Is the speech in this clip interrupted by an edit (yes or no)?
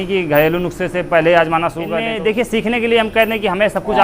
yes